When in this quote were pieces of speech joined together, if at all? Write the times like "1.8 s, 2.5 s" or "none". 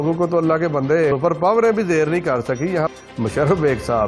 1.1 s, 2.9 s